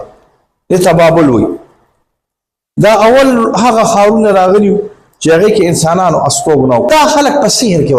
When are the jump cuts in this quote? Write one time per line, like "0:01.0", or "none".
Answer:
0:06.9